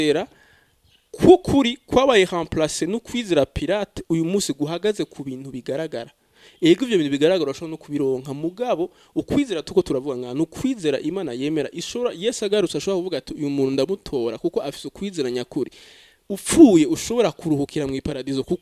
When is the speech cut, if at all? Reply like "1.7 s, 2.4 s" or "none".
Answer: none